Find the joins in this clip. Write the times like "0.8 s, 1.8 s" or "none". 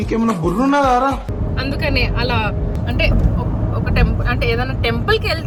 none